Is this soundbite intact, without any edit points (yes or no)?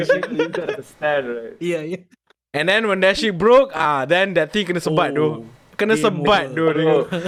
yes